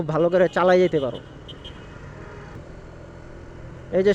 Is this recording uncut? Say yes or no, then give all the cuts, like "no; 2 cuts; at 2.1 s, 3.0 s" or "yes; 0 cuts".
no; 1 cut; at 2.6 s